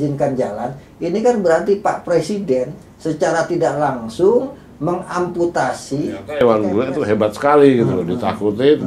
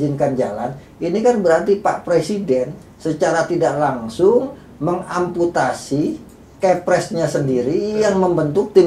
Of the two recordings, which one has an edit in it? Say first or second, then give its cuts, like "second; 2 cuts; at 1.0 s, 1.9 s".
first; 1 cut; at 6.4 s